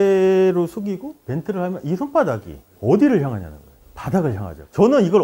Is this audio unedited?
yes; 0 cuts

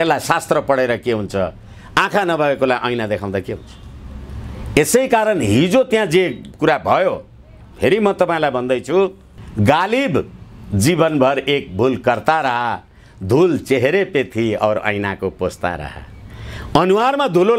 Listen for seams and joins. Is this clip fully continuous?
yes; 0 cuts

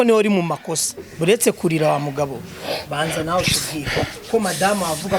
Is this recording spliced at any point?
no; 0 cuts

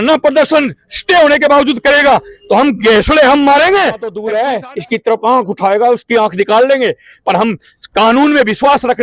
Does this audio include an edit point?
yes; 1 cut; at 4.1 s

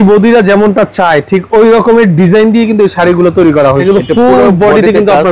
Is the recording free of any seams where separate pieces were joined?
no; 1 cut; at 3.8 s

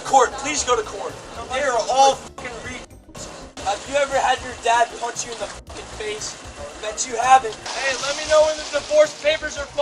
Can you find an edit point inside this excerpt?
yes; 2 cuts; at 3.5 s, 7.6 s

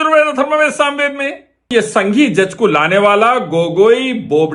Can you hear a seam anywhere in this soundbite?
yes; 1 cut; at 1.7 s

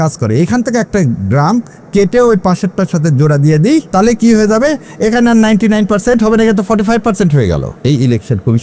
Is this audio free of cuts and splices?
no; 2 cuts; at 3.9 s, 7.7 s

